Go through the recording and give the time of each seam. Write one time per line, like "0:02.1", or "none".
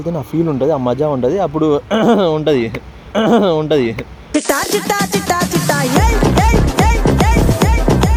none